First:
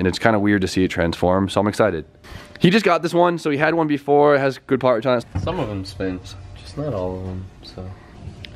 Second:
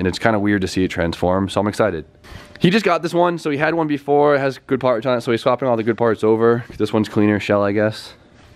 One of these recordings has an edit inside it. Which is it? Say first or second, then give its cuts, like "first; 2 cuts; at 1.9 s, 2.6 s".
second; 1 cut; at 5.2 s